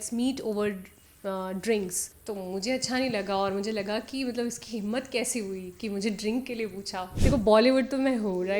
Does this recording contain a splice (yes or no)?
yes